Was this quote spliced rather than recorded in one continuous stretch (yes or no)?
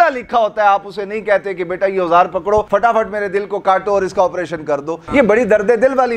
yes